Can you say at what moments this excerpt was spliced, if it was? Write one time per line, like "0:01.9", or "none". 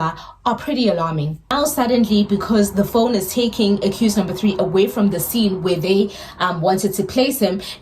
0:01.5